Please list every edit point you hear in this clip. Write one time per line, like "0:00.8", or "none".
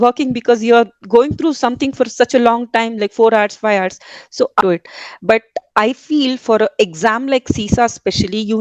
0:04.6

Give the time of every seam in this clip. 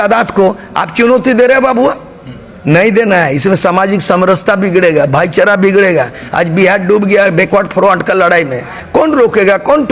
0:08.8

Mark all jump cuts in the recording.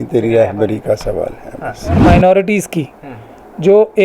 0:02.0

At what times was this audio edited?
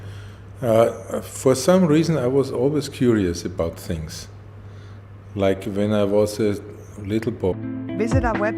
none

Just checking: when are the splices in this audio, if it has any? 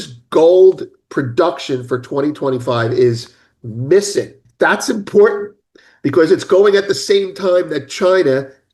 0:04.4

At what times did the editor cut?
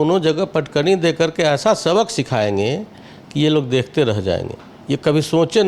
none

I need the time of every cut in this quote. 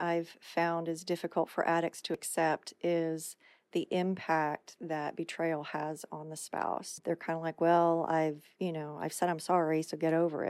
0:02.3
0:06.9

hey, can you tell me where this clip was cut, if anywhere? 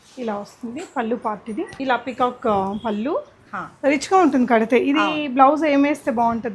0:01.8

